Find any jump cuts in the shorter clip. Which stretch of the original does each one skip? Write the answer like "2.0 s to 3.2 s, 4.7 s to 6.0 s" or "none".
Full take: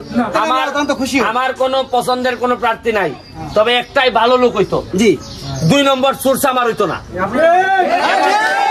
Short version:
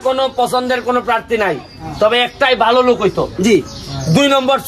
none